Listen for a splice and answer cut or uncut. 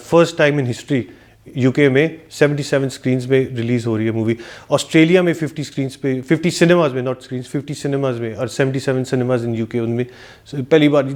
uncut